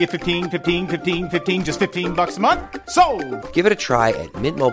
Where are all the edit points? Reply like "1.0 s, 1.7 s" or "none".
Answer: none